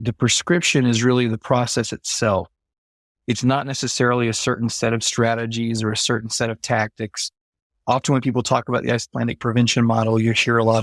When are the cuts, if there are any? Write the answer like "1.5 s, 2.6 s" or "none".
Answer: none